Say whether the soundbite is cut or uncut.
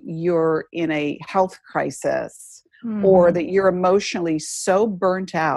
uncut